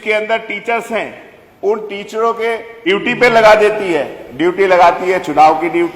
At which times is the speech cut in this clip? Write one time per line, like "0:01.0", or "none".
0:02.7